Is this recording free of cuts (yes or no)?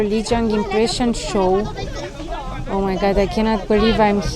yes